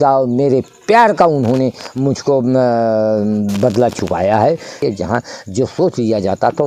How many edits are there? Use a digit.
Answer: 1